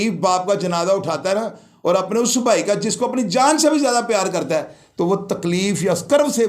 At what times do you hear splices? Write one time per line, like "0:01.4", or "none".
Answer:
none